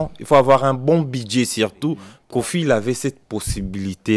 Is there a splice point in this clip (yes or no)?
yes